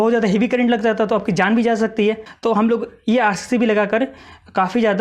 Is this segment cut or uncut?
cut